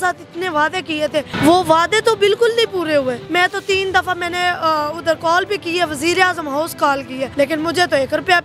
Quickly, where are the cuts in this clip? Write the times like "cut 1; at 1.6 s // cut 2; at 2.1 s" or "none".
cut 1; at 3.2 s // cut 2; at 7.3 s